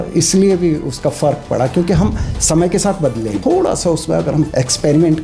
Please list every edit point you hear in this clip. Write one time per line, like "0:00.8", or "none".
0:03.3
0:04.5